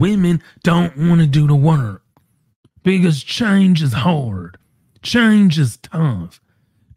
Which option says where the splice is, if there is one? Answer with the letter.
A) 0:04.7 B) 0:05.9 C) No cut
C